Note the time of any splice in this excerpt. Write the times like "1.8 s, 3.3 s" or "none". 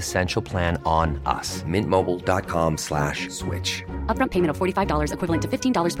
none